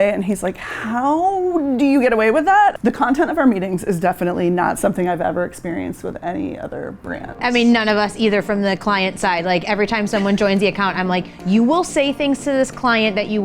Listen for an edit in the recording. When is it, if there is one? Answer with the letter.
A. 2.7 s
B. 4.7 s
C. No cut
A